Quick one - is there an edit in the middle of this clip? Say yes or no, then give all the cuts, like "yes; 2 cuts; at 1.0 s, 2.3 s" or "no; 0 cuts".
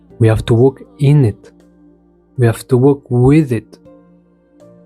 yes; 1 cut; at 4.0 s